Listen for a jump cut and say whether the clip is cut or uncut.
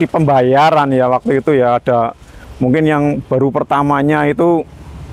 uncut